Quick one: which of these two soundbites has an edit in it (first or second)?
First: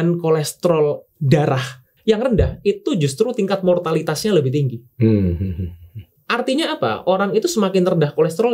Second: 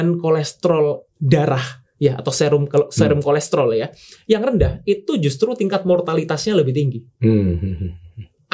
first